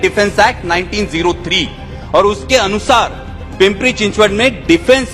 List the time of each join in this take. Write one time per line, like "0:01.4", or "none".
none